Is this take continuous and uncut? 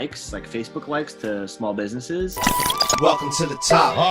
no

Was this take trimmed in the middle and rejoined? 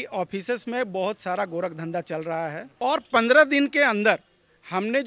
yes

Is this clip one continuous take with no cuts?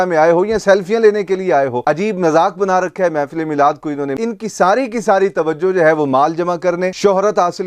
no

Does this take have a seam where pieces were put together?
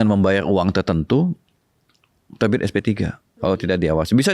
yes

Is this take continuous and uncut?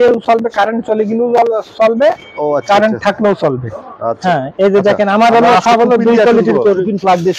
no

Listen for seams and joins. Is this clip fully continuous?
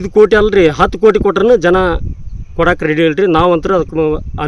yes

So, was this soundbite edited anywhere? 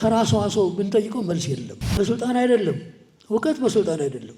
yes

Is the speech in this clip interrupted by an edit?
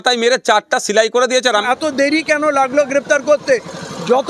yes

